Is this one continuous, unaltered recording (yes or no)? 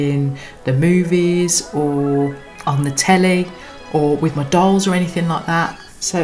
yes